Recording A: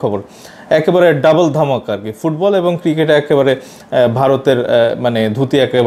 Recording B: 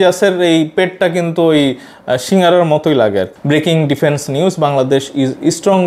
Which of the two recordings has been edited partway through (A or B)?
B